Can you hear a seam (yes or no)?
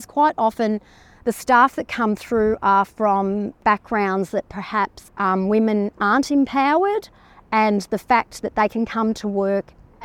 yes